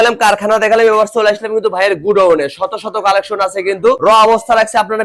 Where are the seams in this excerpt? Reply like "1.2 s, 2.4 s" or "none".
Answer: none